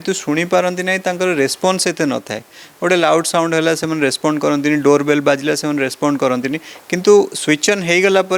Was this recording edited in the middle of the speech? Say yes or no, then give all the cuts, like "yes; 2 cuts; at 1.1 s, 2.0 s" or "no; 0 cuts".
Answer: no; 0 cuts